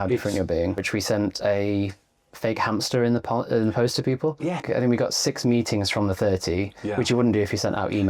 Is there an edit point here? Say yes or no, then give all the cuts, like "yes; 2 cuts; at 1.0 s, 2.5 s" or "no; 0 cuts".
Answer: yes; 2 cuts; at 0.8 s, 4.7 s